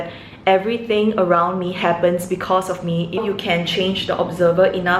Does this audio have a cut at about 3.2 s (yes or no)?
yes